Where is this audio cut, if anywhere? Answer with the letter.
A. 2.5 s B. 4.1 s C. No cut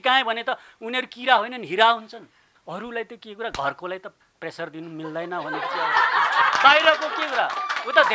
A